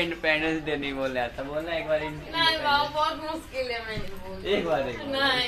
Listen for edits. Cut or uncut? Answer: uncut